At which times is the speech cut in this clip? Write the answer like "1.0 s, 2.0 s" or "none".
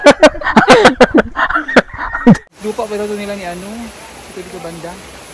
2.4 s